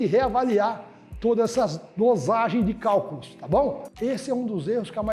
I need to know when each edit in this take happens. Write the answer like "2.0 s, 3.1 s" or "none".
3.9 s